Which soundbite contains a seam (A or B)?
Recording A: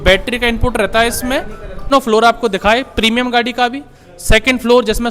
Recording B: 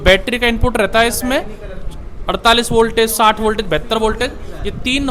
A